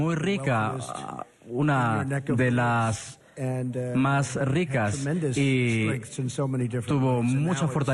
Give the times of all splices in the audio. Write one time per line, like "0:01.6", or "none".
0:05.0